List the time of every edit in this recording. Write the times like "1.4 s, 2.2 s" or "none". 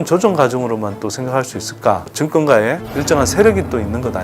2.2 s, 2.9 s